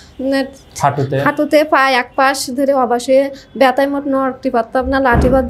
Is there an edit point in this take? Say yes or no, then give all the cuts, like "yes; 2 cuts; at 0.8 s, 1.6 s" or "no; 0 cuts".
no; 0 cuts